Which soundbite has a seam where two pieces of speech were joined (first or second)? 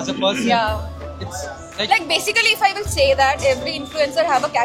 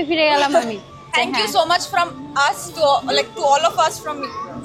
second